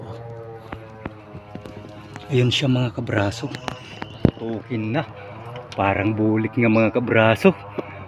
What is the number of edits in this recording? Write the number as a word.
one